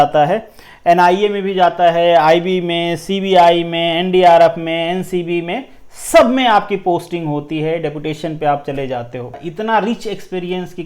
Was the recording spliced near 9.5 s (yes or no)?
yes